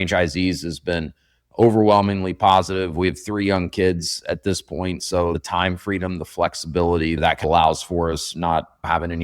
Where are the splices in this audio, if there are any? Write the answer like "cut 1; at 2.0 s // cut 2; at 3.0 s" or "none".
cut 1; at 7.4 s